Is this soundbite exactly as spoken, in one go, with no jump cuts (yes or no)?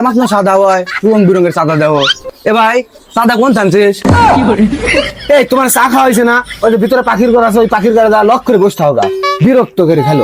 yes